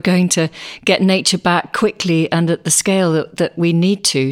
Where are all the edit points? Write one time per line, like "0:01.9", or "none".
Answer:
none